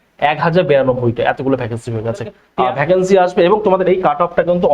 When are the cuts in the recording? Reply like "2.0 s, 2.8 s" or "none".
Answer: 2.4 s